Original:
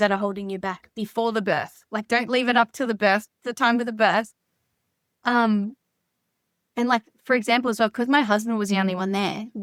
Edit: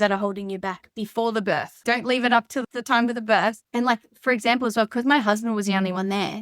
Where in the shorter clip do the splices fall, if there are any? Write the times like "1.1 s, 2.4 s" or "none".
1.7 s, 2.6 s, 3.6 s